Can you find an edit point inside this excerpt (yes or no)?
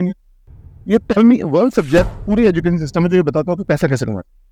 no